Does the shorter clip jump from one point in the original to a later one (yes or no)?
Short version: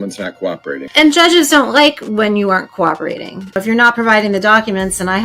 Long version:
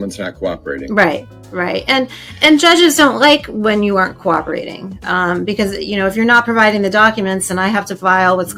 yes